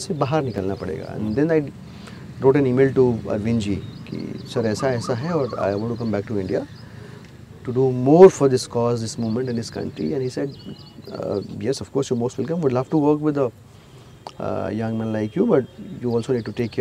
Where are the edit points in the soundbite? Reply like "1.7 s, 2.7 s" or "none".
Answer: none